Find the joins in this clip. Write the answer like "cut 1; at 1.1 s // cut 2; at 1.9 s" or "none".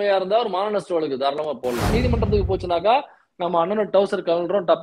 cut 1; at 1.9 s